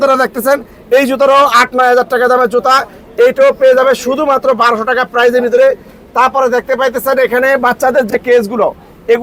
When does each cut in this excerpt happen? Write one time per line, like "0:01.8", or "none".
none